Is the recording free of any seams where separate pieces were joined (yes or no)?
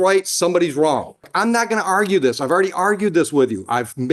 no